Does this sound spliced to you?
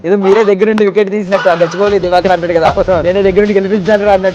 no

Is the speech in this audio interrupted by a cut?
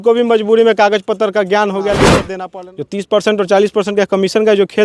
yes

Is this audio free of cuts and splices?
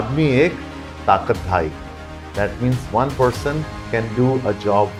yes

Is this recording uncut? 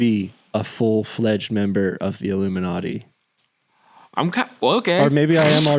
yes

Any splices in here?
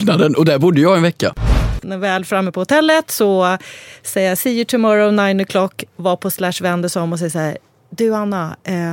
yes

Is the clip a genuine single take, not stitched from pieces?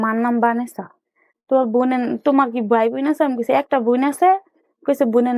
yes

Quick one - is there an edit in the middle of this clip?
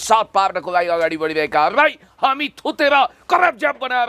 no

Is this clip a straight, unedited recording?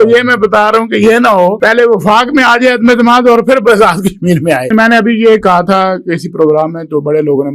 no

